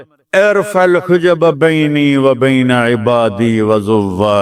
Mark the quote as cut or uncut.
uncut